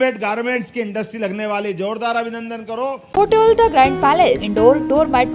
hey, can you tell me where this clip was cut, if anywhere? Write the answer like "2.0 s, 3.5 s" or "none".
3.0 s, 4.5 s